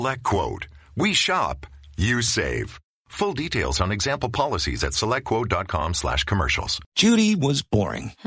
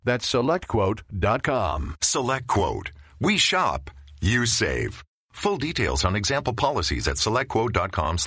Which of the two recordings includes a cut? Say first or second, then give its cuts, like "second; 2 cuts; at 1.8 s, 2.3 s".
first; 1 cut; at 6.9 s